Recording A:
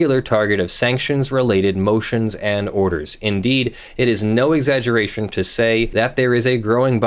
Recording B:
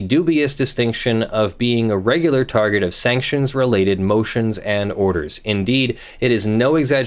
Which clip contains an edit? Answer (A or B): A